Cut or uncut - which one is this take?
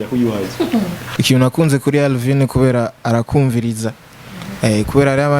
cut